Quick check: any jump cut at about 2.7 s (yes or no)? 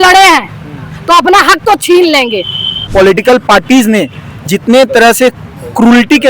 yes